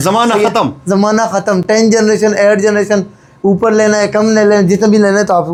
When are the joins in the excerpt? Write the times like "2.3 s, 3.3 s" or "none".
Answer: none

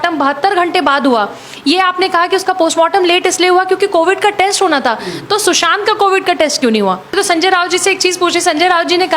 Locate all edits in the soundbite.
7.1 s

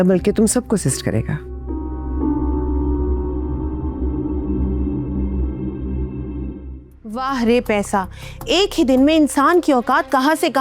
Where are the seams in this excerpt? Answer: 7.1 s

